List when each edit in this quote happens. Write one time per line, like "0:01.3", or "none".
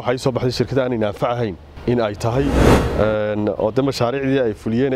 0:01.7
0:02.7